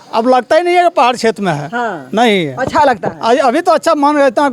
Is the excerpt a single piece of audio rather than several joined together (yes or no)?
yes